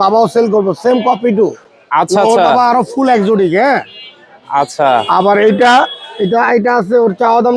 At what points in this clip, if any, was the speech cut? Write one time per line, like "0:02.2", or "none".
none